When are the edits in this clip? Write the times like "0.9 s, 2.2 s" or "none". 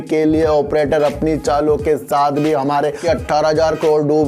3.0 s